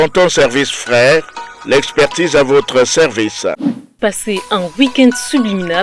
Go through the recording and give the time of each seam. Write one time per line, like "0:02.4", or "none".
0:04.0